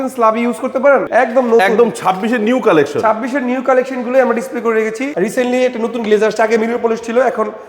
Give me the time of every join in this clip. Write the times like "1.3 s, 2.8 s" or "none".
1.1 s, 5.0 s